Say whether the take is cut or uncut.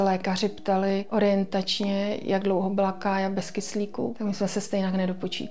cut